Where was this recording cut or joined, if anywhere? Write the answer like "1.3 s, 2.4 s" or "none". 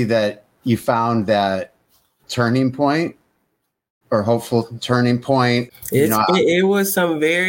none